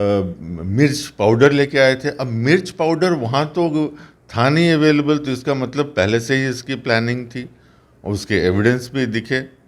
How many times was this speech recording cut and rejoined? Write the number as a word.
zero